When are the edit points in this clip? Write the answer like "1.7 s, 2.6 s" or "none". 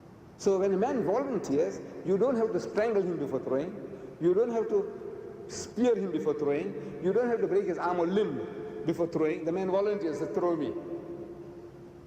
5.7 s